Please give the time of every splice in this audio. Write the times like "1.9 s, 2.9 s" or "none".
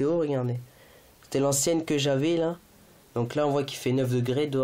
none